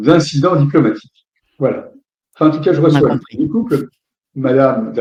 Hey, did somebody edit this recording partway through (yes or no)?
no